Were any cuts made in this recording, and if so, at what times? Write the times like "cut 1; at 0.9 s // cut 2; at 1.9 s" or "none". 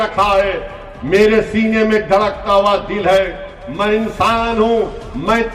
none